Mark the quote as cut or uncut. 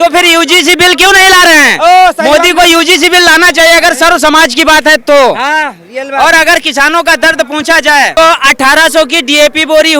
cut